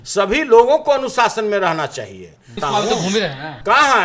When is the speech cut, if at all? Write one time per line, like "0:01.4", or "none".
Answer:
0:02.6